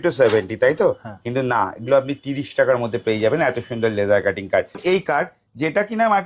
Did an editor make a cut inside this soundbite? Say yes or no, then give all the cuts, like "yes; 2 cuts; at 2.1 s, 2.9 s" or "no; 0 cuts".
yes; 1 cut; at 4.8 s